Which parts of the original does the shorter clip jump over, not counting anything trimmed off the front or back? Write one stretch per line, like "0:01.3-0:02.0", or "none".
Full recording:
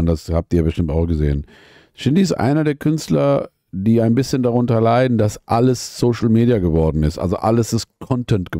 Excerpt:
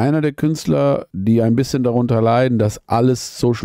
0:03.5-0:03.7